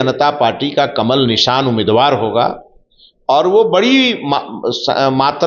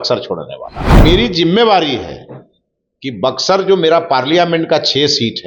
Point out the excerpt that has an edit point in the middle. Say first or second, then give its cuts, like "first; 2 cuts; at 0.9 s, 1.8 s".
second; 1 cut; at 1.0 s